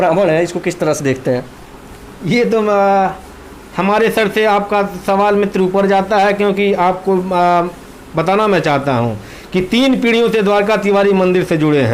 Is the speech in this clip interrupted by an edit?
no; 0 cuts

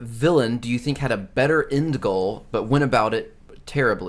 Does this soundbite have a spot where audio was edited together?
no; 0 cuts

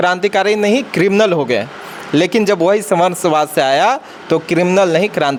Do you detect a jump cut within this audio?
no; 0 cuts

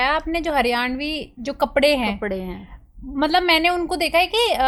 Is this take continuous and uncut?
yes; 0 cuts

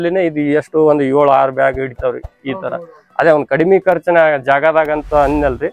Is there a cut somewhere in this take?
no; 0 cuts

